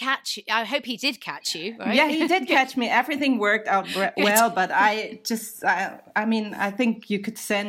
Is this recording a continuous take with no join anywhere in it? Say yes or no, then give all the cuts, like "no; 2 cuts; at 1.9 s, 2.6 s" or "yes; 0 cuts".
yes; 0 cuts